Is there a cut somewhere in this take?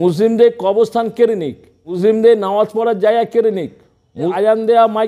yes; 2 cuts; at 2.0 s, 4.3 s

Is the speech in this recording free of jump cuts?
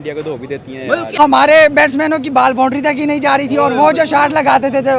no; 1 cut; at 1.2 s

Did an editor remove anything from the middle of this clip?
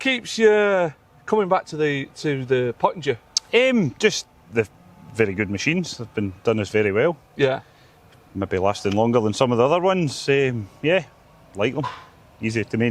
no; 0 cuts

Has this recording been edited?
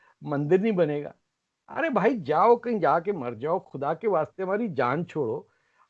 no; 0 cuts

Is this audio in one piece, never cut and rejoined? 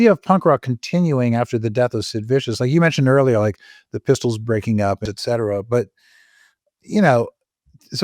no; 1 cut; at 5.0 s

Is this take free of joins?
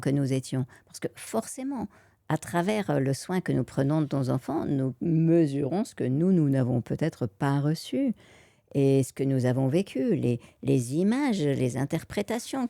yes; 0 cuts

